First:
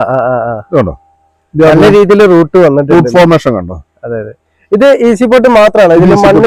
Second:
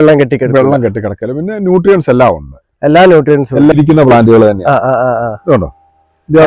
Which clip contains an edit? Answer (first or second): second